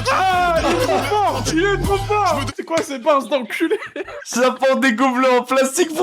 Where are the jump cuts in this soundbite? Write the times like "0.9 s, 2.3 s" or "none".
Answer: 2.5 s, 4.1 s